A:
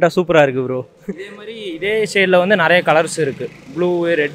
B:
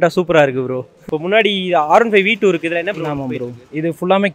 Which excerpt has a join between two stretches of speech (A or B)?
B